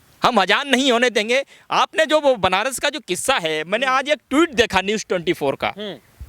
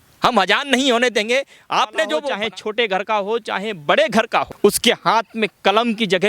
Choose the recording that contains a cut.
second; 2 cuts; at 2.2 s, 4.5 s

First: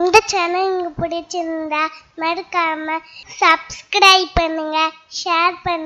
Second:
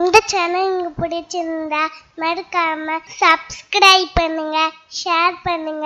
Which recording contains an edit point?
second; 1 cut; at 3.1 s

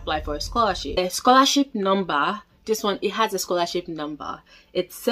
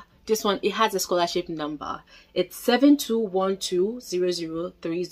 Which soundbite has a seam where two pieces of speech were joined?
first; 1 cut; at 1.0 s

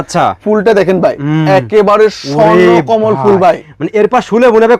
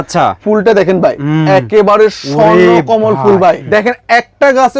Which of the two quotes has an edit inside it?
second; 1 cut; at 3.6 s

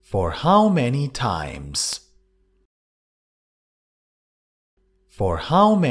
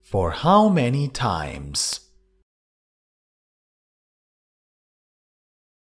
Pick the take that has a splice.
first; 1 cut; at 2.2 s

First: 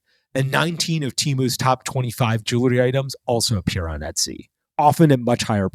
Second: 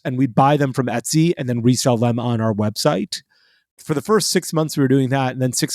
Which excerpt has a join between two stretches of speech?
second; 1 cut; at 3.6 s

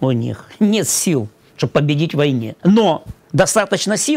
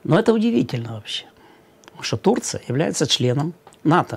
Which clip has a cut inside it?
first; 1 cut; at 2.5 s

